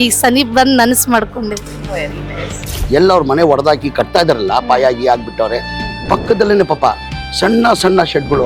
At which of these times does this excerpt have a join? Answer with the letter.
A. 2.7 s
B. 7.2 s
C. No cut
A